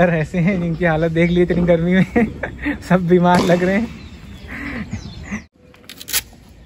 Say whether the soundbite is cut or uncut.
cut